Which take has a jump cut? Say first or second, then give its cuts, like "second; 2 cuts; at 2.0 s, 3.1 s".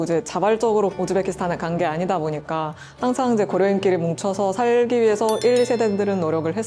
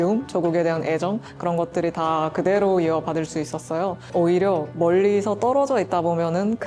second; 1 cut; at 4.1 s